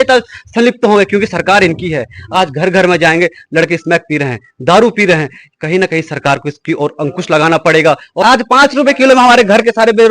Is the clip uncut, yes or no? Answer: no